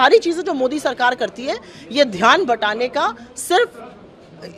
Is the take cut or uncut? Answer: uncut